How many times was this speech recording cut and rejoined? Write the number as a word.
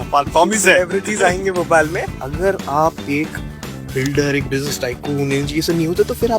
one